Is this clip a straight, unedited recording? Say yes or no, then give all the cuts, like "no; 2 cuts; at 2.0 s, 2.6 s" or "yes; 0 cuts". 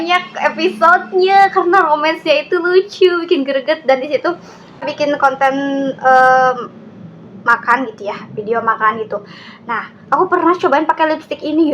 no; 1 cut; at 4.8 s